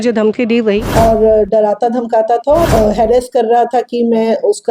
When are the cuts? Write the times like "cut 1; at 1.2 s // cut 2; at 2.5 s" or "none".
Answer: cut 1; at 0.9 s // cut 2; at 2.7 s